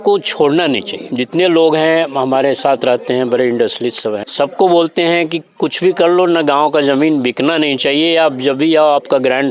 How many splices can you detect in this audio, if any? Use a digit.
2